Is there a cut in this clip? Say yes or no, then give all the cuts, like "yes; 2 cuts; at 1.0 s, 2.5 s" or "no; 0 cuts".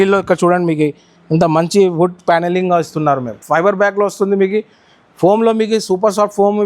yes; 1 cut; at 3.4 s